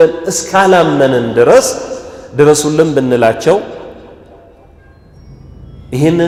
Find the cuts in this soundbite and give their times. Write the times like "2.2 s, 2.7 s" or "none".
none